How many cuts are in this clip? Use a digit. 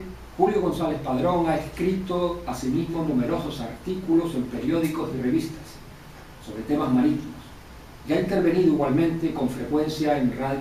1